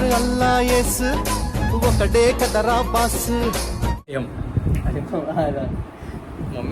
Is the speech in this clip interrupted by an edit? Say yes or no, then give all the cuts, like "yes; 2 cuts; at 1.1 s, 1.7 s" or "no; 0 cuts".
yes; 1 cut; at 4.1 s